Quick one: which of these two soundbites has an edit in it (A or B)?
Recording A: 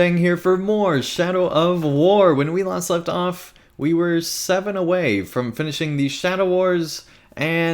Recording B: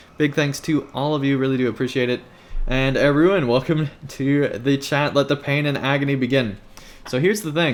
A